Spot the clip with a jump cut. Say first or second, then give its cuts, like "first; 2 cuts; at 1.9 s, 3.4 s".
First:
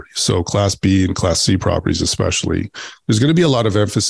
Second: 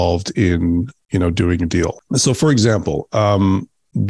second; 1 cut; at 2.0 s